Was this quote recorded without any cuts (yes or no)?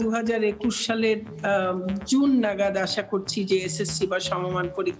yes